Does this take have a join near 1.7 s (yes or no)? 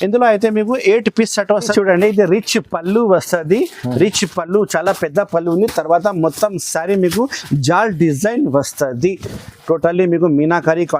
yes